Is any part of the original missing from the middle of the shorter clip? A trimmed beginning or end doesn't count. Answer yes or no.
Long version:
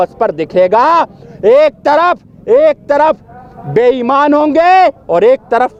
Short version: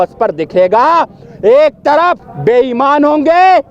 yes